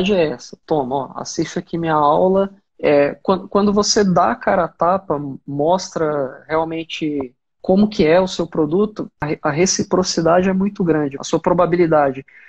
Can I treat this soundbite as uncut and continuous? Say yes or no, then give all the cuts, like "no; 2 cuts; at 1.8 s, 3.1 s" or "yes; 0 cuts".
no; 4 cuts; at 2.6 s, 7.4 s, 9.2 s, 11.2 s